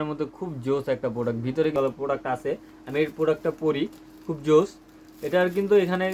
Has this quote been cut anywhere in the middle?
yes; 1 cut; at 1.7 s

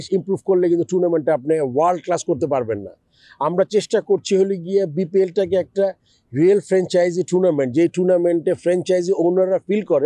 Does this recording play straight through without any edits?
yes; 0 cuts

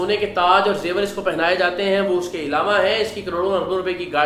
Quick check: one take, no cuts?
yes; 0 cuts

